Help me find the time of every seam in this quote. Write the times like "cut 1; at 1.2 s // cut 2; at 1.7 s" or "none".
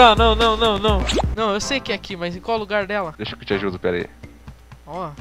cut 1; at 1.3 s